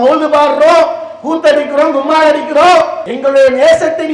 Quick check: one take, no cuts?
no; 1 cut; at 3.0 s

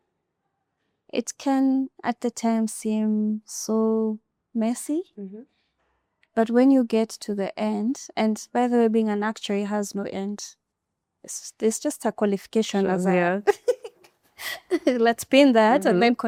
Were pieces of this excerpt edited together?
no; 0 cuts

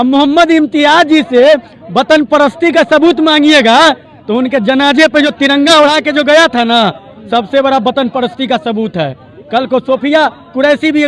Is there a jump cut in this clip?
no; 0 cuts

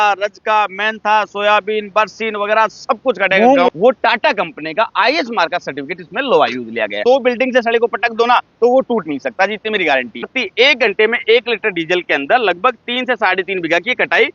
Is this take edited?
yes; 3 cuts; at 3.7 s, 7.0 s, 10.4 s

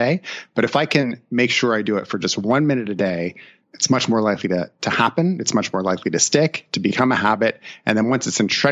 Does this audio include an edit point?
yes; 1 cut; at 3.6 s

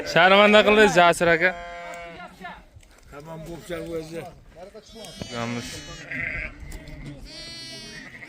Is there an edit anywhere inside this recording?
yes; 1 cut; at 5.4 s

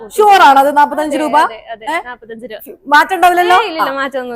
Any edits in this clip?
no; 0 cuts

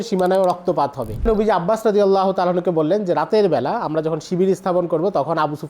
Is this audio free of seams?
no; 1 cut; at 1.2 s

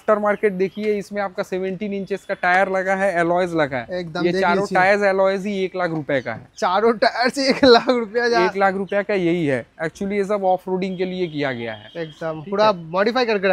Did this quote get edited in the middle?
no; 0 cuts

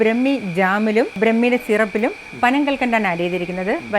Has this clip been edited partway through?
yes; 1 cut; at 1.1 s

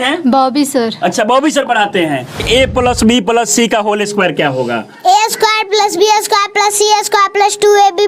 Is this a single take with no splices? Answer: no; 1 cut; at 2.4 s

